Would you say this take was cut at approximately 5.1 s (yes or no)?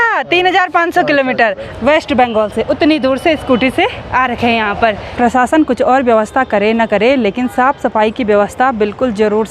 yes